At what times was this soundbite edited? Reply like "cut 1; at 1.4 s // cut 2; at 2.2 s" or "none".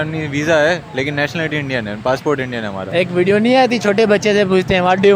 cut 1; at 2.9 s